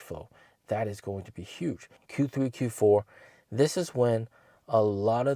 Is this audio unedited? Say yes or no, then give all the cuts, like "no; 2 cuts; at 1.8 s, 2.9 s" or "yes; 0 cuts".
no; 1 cut; at 1.9 s